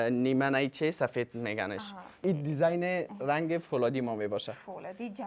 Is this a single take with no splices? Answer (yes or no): no